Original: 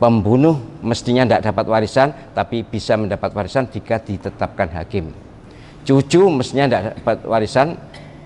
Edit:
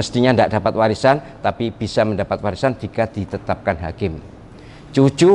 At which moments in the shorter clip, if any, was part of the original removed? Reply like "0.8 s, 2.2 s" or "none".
none